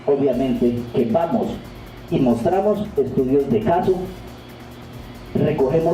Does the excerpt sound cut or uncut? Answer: uncut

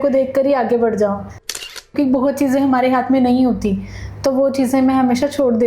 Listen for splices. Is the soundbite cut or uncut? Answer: cut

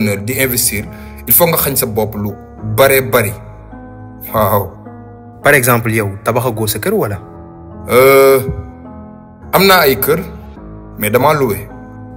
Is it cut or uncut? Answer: uncut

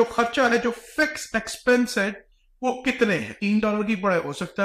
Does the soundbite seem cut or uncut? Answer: cut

